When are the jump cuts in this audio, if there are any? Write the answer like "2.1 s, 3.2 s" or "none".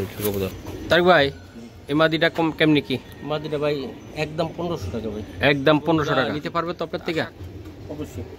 6.5 s